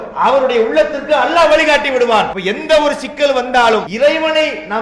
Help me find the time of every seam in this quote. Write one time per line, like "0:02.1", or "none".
0:02.4
0:03.9